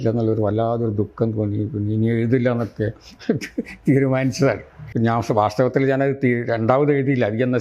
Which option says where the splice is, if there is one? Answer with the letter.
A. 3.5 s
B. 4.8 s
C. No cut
B